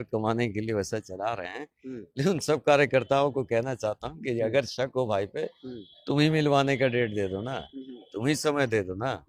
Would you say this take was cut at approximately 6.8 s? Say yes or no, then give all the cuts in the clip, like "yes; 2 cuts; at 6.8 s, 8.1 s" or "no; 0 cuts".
no; 0 cuts